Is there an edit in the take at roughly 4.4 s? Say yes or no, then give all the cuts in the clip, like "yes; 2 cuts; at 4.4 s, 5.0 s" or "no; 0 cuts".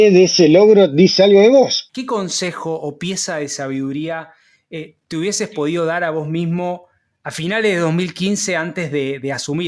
no; 1 cut; at 1.9 s